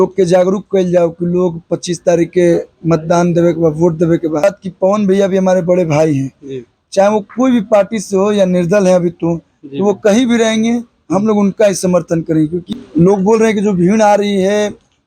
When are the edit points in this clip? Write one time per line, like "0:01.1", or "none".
0:04.4
0:12.7